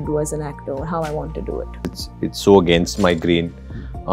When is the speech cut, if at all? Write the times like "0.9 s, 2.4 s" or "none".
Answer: 1.9 s